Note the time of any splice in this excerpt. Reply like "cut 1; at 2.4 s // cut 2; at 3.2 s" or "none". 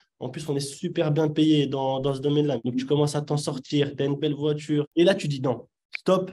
cut 1; at 2.6 s // cut 2; at 4.9 s